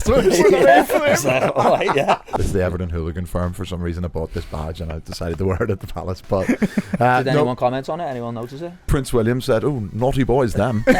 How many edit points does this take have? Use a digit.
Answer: 1